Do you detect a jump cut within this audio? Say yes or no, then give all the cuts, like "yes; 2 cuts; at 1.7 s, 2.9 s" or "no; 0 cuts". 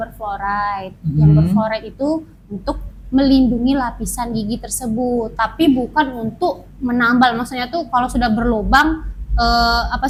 no; 0 cuts